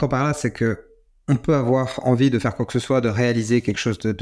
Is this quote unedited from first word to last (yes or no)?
yes